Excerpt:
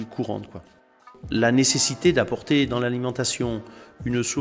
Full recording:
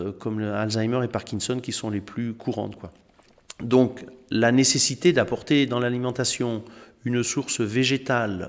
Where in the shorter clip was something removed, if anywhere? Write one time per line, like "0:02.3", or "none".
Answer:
0:01.1